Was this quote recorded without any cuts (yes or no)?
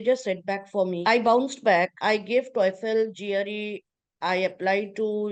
no